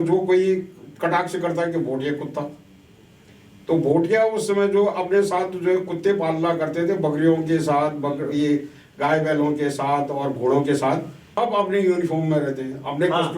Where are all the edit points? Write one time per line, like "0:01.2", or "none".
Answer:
0:11.3

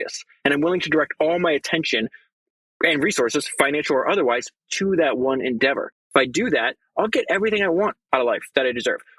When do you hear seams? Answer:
0:06.0

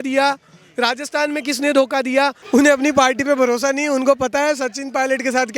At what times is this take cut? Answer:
0:02.4

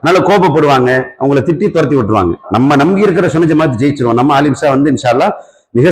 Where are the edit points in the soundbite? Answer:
0:02.4

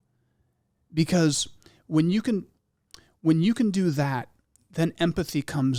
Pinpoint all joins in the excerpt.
none

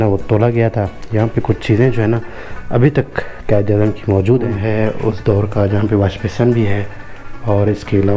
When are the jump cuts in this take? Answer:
0:04.6

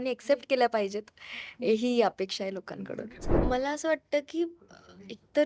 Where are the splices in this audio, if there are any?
0:03.2

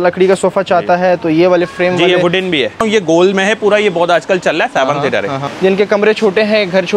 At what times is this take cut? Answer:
0:02.7
0:05.4

